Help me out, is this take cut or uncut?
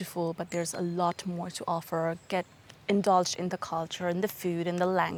uncut